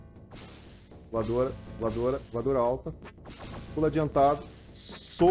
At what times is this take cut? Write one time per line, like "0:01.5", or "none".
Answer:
none